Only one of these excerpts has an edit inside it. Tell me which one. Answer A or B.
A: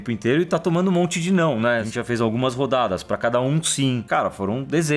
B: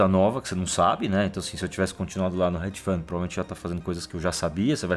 A